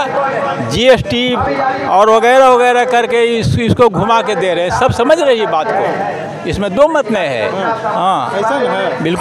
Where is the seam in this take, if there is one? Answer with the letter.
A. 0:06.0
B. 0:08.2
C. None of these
C